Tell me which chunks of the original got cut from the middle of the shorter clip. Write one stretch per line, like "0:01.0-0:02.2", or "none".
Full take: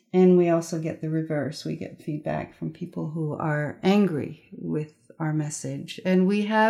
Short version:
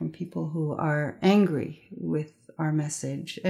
none